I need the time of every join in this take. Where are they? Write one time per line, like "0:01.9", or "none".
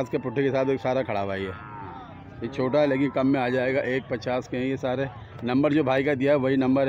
none